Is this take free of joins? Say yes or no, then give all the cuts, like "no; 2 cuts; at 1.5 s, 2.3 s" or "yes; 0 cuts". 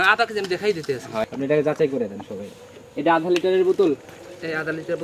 no; 1 cut; at 1.2 s